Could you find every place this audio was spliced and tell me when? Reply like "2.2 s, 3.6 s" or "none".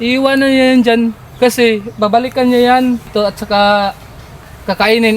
3.1 s